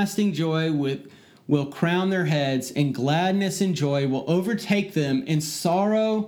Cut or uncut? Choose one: uncut